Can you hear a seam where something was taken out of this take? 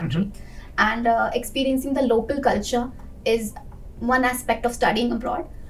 no; 0 cuts

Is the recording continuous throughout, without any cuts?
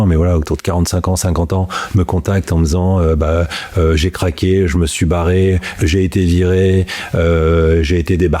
yes; 0 cuts

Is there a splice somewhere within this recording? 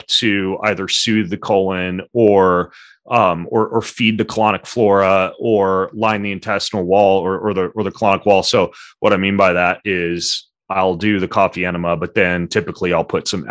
no; 0 cuts

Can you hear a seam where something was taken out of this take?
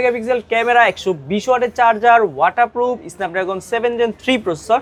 no; 0 cuts

